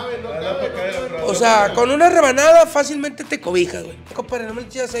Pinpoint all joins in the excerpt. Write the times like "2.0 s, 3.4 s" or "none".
4.1 s